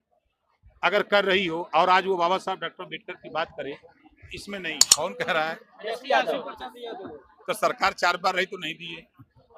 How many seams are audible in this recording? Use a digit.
1